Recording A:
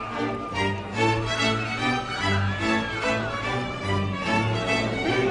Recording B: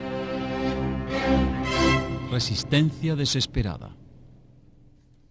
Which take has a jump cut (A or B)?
B